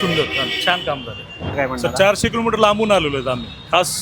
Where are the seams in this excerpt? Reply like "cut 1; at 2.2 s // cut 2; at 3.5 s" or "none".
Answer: cut 1; at 1.5 s